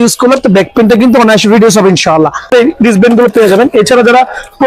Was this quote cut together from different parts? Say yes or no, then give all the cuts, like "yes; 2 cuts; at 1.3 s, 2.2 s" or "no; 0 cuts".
yes; 1 cut; at 2.5 s